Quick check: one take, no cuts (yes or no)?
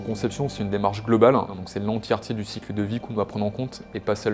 no